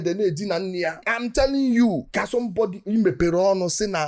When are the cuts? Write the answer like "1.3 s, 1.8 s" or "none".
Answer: none